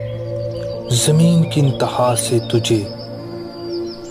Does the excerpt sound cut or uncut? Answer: cut